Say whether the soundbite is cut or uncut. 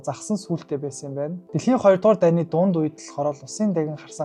cut